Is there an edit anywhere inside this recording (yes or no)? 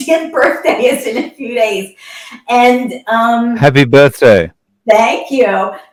no